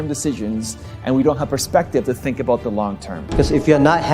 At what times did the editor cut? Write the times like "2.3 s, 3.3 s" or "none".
3.2 s